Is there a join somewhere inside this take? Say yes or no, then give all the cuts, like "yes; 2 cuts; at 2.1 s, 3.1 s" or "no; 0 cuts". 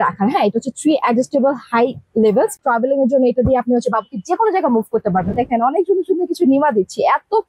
yes; 2 cuts; at 2.6 s, 5.3 s